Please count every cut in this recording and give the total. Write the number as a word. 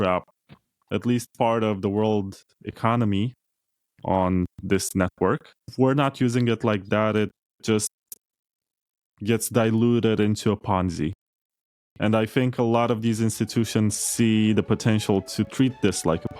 one